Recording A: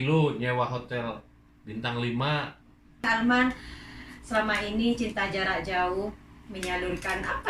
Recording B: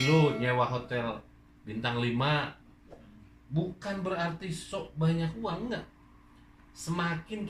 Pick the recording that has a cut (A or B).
A